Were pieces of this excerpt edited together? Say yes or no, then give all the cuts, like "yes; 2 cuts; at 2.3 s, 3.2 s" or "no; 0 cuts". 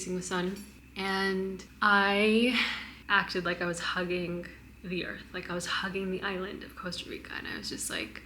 yes; 1 cut; at 2.9 s